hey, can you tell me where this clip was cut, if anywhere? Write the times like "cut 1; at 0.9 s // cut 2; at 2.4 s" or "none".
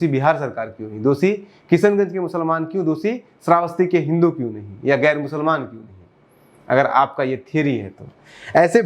none